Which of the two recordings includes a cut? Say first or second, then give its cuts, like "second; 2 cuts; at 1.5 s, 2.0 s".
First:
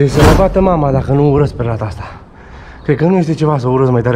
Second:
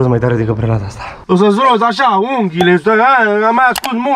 second; 1 cut; at 1.2 s